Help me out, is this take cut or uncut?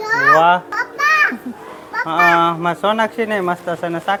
uncut